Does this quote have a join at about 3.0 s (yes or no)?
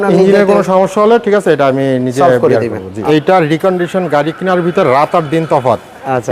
yes